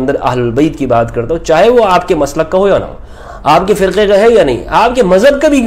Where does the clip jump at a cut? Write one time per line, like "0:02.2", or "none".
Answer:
none